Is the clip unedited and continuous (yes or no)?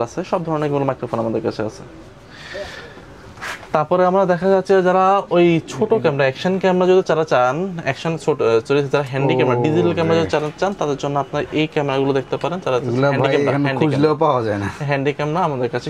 yes